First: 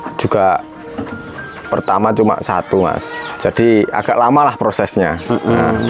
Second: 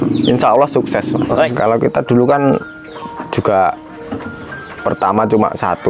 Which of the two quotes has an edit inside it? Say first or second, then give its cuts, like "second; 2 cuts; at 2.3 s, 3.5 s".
second; 1 cut; at 1.5 s